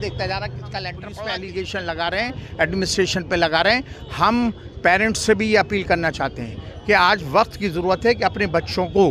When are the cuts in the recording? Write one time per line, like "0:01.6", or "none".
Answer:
0:01.0